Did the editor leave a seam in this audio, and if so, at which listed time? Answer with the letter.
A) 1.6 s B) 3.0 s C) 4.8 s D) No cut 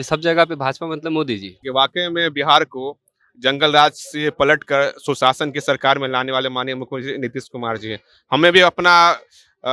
A